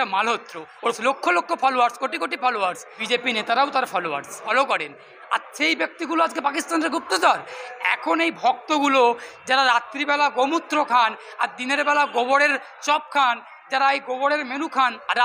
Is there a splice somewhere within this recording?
yes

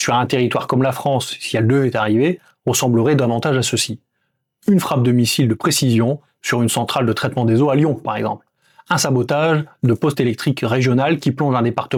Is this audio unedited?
yes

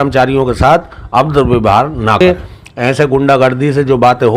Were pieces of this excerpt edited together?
yes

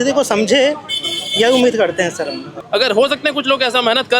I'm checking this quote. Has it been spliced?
yes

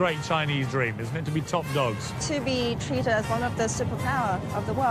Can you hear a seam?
yes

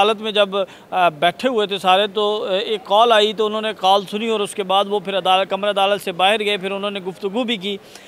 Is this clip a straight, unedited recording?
yes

